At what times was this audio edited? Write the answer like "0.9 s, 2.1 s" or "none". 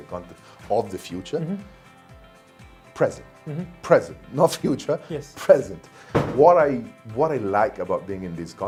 none